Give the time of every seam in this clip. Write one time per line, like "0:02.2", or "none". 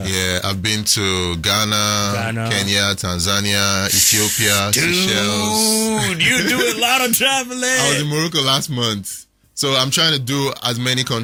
none